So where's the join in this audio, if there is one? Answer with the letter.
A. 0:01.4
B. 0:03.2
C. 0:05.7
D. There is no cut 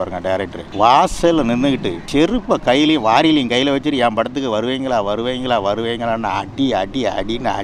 D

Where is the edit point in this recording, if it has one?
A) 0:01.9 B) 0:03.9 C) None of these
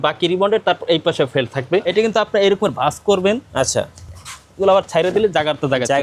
A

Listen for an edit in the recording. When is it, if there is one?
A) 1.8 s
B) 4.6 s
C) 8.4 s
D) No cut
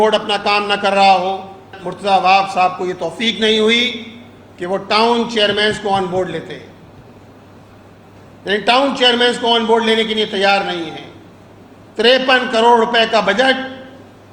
A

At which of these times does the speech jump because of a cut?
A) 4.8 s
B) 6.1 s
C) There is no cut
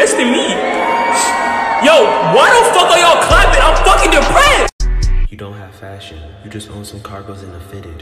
A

